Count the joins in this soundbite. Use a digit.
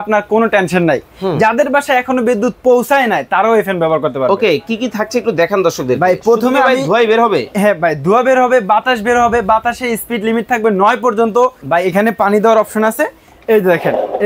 1